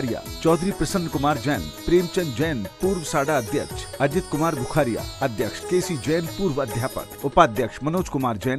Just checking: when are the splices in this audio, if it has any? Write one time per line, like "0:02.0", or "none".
none